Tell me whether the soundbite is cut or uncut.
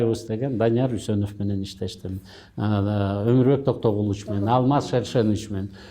uncut